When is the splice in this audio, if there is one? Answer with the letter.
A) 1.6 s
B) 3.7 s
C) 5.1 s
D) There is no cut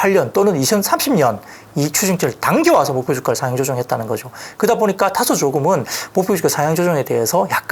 D